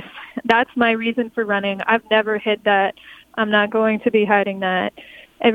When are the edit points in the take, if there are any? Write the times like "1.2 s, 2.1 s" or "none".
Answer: 1.8 s